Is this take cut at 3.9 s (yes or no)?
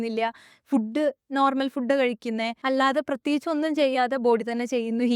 no